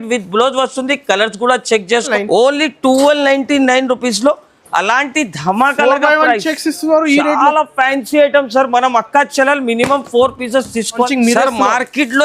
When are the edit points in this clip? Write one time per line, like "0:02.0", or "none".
0:02.1
0:11.1